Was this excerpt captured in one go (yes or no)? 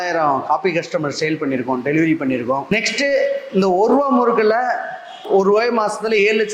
no